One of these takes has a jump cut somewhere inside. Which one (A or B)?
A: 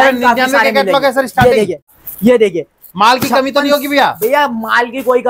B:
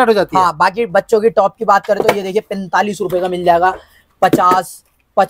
A